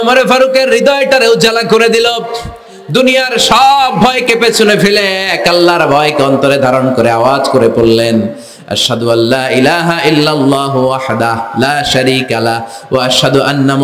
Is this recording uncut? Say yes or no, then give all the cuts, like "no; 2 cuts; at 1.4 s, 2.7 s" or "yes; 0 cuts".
yes; 0 cuts